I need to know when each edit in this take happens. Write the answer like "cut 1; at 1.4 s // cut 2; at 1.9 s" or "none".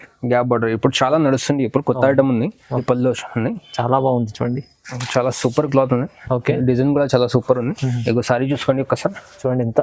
cut 1; at 2.8 s